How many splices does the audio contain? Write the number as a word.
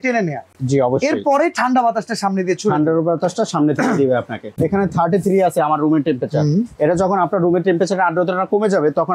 one